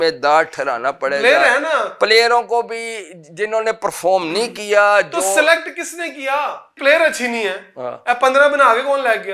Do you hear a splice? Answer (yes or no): yes